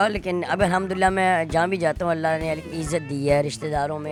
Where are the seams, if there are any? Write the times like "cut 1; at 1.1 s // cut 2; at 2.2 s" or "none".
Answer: none